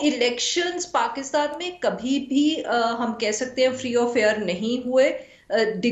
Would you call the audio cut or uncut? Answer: uncut